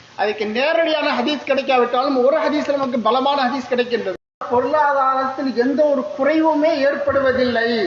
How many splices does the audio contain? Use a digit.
1